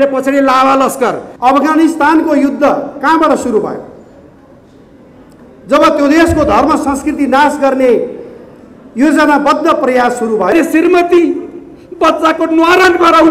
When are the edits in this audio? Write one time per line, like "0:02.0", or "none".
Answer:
0:01.3
0:10.5